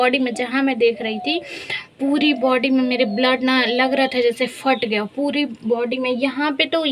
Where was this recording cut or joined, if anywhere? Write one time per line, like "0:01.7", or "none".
none